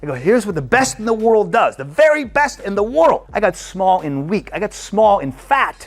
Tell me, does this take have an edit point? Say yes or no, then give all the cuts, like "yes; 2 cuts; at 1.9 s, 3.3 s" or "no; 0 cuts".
yes; 1 cut; at 3.3 s